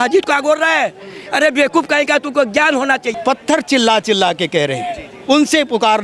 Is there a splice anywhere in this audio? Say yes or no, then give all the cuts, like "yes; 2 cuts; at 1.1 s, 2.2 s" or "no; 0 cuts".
yes; 1 cut; at 3.1 s